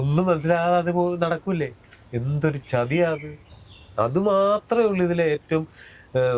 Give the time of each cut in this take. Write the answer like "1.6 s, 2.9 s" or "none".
none